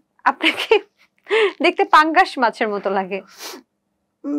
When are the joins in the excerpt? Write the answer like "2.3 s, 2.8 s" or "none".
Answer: none